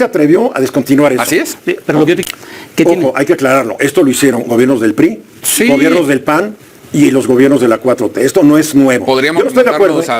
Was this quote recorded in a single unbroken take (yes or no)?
no